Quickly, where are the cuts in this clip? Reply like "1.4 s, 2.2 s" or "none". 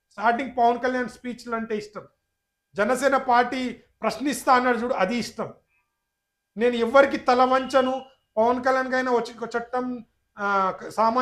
none